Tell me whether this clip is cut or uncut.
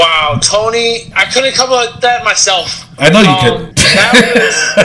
cut